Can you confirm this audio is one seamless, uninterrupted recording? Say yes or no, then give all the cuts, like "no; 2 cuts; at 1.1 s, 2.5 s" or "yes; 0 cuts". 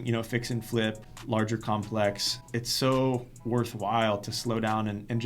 no; 2 cuts; at 1.1 s, 2.4 s